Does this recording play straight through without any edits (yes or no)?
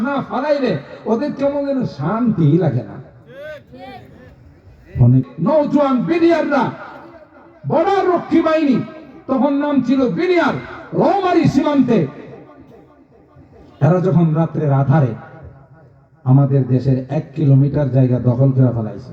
no